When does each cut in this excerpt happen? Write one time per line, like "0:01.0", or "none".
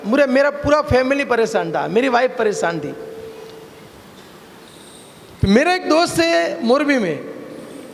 none